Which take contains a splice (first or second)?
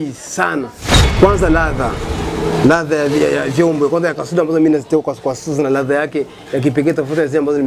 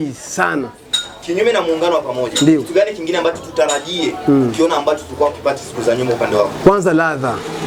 first